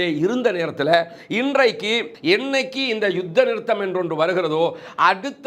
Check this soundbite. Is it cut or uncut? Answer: cut